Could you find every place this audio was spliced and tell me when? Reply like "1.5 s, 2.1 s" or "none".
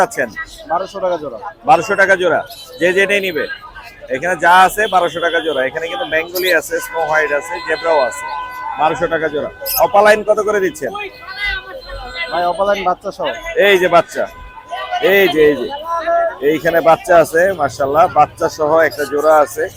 none